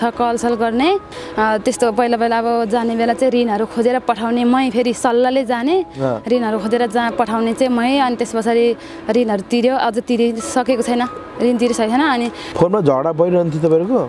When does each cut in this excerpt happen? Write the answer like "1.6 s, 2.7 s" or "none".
1.2 s, 12.4 s